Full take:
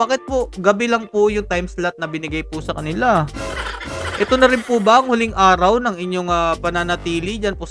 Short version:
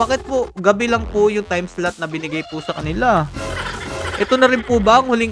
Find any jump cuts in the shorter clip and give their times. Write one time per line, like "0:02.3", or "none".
none